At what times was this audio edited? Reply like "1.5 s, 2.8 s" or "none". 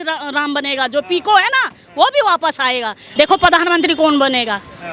3.0 s